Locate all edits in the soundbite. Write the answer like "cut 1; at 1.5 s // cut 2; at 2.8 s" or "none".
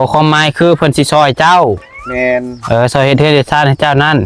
none